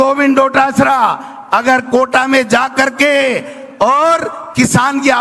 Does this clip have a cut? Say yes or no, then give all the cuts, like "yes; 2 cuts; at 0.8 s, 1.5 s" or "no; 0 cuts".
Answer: no; 0 cuts